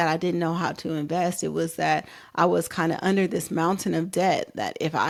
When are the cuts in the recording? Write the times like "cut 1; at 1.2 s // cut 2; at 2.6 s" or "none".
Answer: none